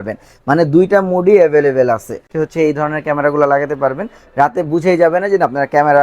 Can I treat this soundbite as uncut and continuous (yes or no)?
no